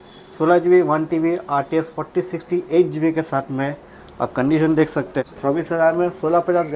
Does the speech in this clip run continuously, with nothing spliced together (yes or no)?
no